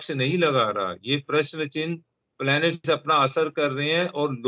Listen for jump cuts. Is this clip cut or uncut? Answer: uncut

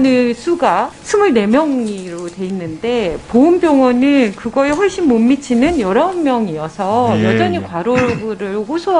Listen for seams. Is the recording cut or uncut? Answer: uncut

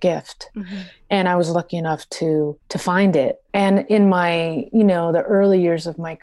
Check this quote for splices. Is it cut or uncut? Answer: cut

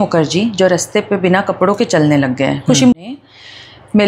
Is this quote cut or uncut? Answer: cut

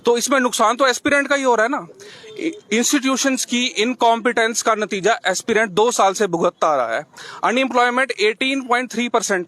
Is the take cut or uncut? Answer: uncut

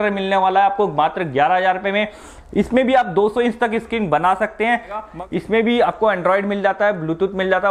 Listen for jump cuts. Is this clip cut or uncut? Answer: cut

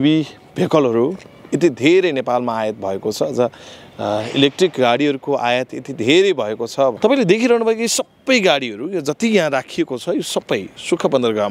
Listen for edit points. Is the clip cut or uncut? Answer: cut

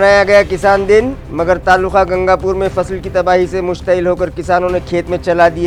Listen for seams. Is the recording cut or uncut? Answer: uncut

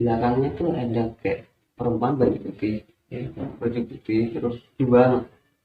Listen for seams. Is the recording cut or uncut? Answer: uncut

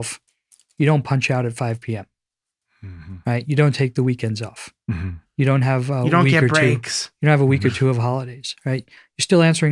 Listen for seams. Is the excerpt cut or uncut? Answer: uncut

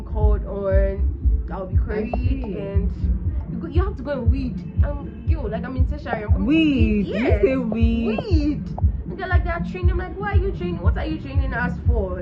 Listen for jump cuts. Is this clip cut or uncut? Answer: uncut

